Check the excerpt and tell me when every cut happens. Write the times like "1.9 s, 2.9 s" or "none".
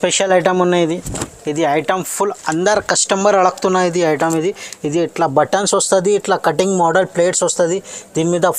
none